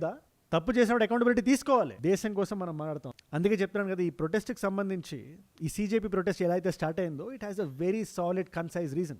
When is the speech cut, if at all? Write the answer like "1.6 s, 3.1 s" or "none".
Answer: 1.9 s

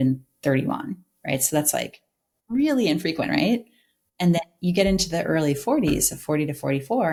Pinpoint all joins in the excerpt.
none

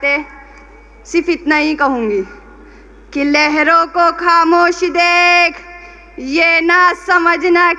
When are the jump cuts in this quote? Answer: none

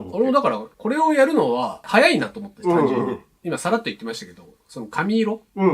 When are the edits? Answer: 3.3 s

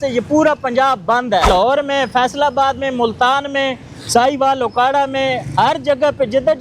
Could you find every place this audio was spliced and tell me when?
1.4 s

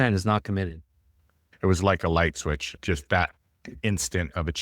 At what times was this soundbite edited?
1.4 s, 2.7 s

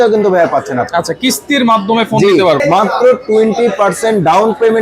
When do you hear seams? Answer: 2.6 s

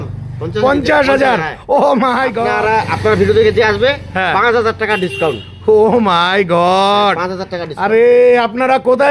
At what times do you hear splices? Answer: 2.4 s

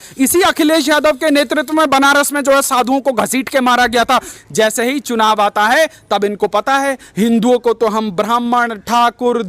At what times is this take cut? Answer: 4.4 s

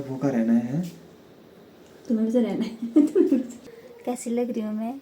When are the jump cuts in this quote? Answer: 3.5 s

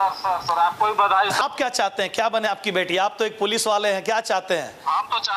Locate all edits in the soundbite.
1.4 s

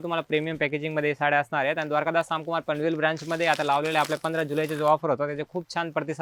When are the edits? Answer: none

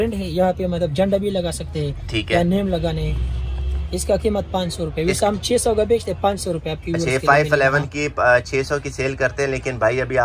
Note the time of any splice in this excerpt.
none

